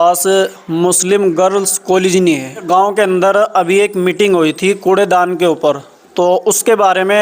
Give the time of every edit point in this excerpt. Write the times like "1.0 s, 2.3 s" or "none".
2.6 s